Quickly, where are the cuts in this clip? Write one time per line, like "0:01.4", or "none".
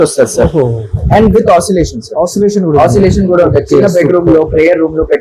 none